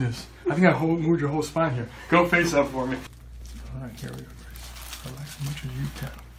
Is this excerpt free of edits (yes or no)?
yes